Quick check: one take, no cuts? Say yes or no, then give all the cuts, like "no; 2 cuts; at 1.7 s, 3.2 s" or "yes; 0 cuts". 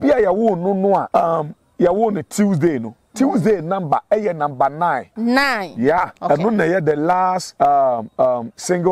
no; 4 cuts; at 1.1 s, 5.1 s, 6.2 s, 7.5 s